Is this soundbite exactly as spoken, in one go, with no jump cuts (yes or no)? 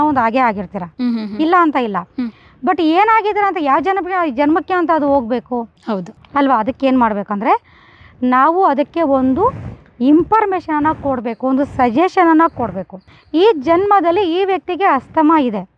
yes